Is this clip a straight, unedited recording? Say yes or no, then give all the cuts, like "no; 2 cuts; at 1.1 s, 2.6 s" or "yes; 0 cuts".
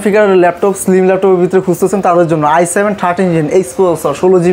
yes; 0 cuts